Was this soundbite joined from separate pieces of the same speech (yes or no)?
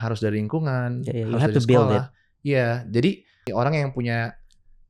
yes